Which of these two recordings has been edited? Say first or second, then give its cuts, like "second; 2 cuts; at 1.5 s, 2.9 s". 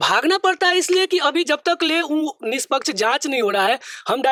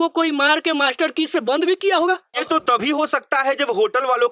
second; 1 cut; at 2.4 s